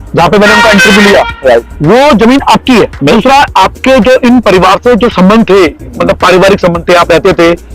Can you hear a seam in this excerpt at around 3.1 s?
yes; 1 cut; at 3.1 s

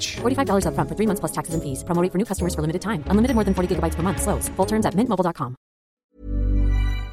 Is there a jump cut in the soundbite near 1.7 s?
no; 1 cut; at 6.1 s

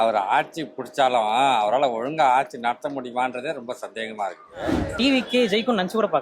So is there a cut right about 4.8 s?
yes; 1 cut; at 4.8 s

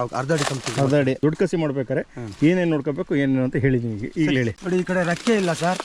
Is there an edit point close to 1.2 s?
yes; 2 cuts; at 1.2 s, 4.4 s

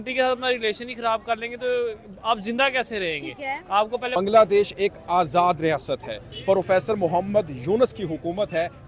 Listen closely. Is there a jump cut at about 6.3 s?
no; 1 cut; at 4.1 s

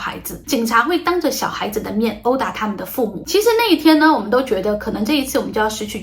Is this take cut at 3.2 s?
yes; 1 cut; at 3.2 s

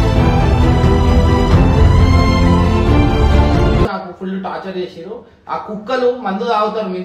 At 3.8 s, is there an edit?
yes; 1 cut; at 3.8 s

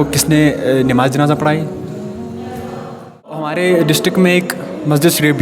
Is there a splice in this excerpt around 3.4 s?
yes; 1 cut; at 3.4 s

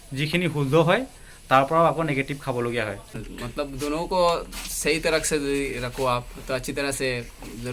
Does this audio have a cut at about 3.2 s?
yes; 1 cut; at 3.2 s

